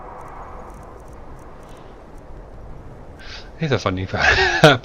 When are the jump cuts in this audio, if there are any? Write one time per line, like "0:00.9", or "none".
0:03.0